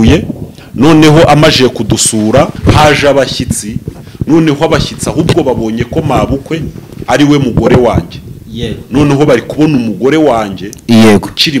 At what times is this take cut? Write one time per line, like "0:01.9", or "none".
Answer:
0:02.6